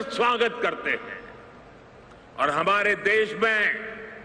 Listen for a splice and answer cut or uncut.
uncut